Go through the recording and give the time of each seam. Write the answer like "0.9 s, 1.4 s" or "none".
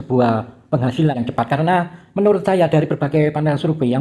1.1 s

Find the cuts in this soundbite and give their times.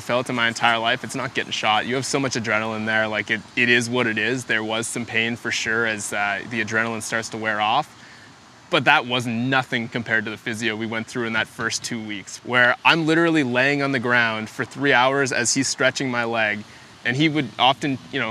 none

